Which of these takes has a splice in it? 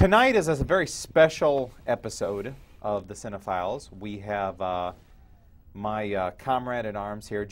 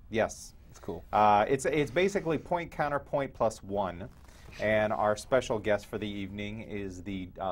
second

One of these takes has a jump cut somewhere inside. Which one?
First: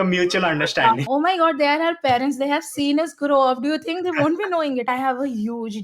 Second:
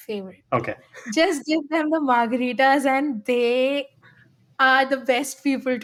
first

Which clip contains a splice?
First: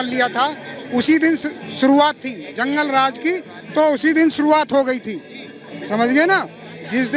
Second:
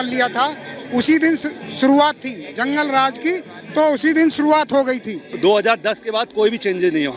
second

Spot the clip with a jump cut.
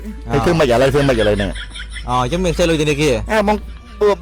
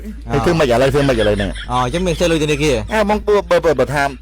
second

